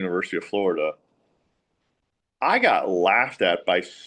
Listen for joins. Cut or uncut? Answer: uncut